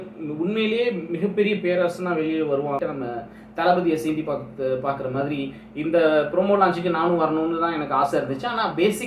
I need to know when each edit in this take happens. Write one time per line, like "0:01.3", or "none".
0:02.8